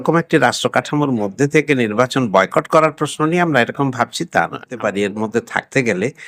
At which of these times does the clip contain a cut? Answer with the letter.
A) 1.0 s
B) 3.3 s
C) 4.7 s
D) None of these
C